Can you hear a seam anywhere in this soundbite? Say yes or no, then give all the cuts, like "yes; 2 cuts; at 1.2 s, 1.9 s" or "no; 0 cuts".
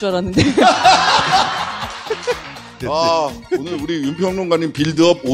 no; 0 cuts